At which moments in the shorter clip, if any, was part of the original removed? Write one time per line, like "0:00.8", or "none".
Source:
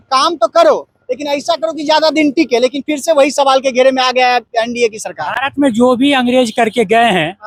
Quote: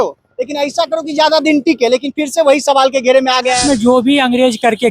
0:03.6

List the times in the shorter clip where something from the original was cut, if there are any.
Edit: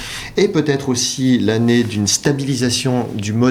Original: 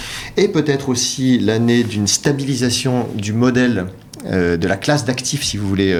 none

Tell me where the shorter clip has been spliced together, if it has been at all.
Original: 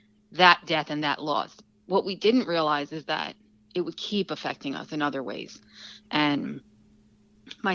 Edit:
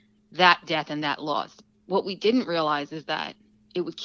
none

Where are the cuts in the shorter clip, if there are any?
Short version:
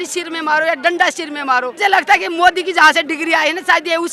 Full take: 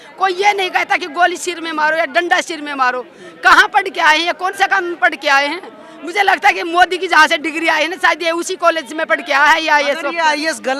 0:01.7

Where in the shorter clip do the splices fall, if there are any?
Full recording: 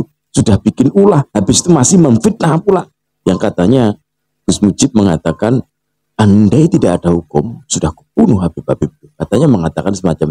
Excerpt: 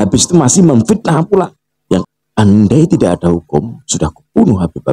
0:02.0

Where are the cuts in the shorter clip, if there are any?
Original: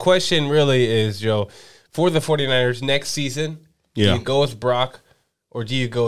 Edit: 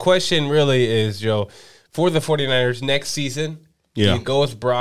none

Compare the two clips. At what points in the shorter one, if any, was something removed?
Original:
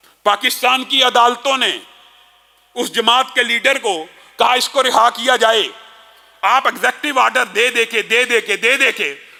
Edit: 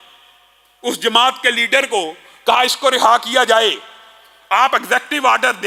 none

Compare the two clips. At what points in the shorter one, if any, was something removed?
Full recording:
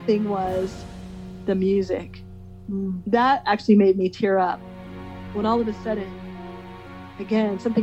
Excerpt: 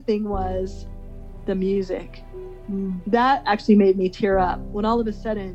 0:04.6

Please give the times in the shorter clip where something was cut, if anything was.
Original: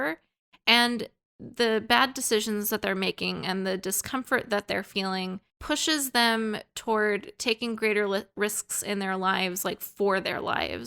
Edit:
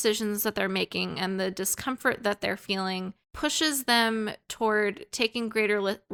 none

